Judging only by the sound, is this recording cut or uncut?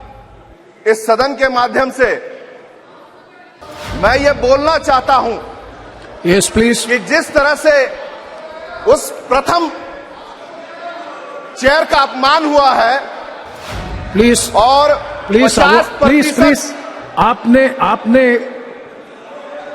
cut